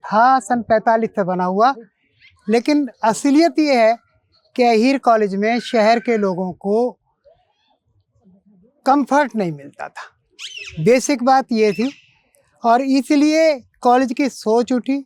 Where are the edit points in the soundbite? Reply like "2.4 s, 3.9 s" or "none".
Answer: none